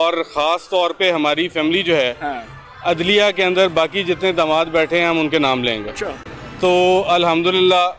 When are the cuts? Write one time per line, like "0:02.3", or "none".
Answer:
none